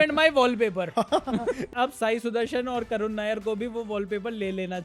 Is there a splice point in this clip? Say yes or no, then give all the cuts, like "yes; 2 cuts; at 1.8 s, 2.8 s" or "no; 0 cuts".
yes; 1 cut; at 1.7 s